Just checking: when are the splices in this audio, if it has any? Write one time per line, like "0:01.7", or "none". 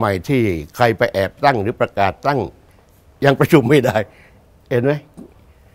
none